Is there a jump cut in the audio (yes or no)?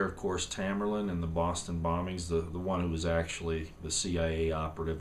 yes